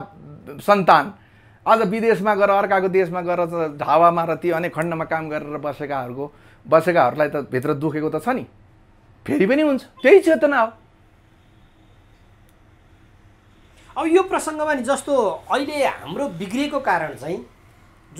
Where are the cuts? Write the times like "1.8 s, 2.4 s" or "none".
none